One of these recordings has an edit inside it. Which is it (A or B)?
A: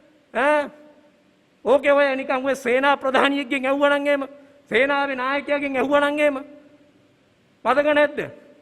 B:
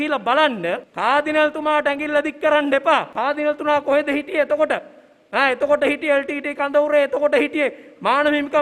B